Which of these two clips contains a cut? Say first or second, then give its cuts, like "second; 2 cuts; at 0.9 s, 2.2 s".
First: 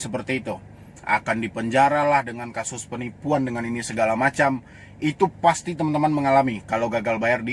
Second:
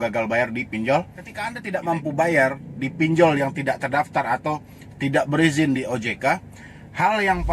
second; 1 cut; at 1.6 s